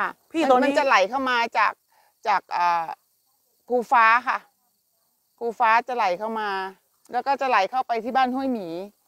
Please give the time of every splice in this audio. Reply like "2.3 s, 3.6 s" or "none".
none